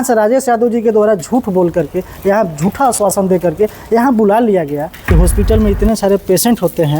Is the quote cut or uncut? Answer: cut